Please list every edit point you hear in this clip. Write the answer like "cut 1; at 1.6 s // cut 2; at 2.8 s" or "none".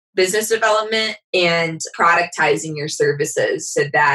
cut 1; at 1.8 s